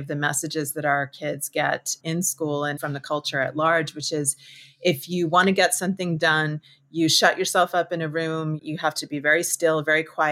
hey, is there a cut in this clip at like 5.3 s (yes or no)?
no